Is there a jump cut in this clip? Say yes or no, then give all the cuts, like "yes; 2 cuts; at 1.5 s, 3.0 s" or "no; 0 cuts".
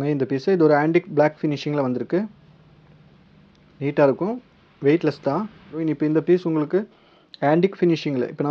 yes; 1 cut; at 5.7 s